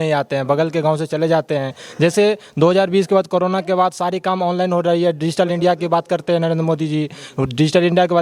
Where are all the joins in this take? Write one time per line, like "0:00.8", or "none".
none